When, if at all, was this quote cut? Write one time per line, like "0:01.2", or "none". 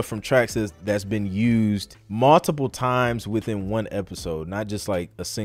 0:02.0